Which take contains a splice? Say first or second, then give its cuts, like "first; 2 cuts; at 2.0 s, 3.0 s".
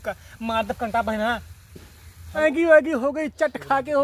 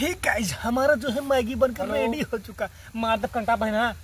first; 1 cut; at 2.4 s